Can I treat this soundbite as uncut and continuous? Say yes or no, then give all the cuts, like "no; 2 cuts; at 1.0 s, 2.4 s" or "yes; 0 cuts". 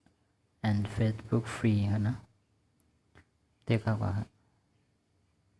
no; 1 cut; at 4.1 s